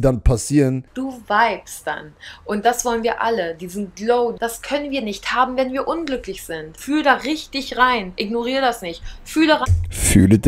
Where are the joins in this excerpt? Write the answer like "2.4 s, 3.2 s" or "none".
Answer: 0.9 s, 4.4 s, 6.7 s